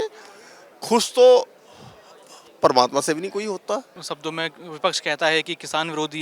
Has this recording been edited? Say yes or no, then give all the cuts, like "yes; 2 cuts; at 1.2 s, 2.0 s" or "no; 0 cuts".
no; 0 cuts